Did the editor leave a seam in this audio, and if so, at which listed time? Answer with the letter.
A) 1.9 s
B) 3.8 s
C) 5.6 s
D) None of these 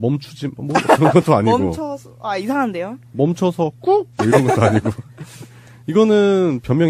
A